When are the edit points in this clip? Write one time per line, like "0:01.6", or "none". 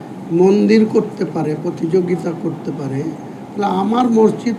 none